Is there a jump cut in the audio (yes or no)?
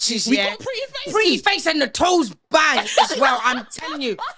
no